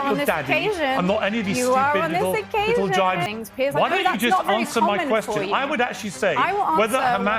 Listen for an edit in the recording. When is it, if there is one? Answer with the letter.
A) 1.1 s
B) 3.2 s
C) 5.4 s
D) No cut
B